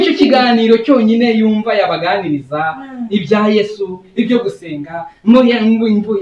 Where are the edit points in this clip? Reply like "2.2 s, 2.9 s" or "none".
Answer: none